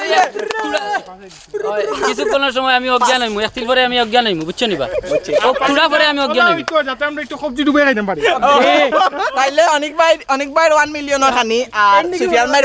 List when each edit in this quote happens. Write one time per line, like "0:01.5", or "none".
none